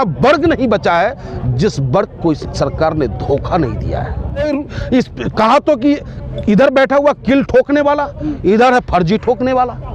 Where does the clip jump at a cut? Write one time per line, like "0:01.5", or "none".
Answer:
0:04.4